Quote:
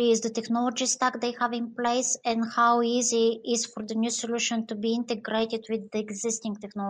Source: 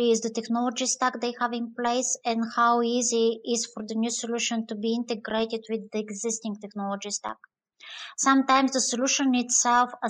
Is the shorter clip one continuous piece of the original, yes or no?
yes